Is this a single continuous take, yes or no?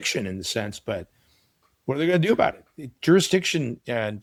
yes